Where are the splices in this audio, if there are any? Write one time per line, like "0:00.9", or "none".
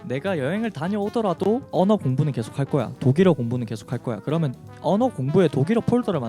0:01.7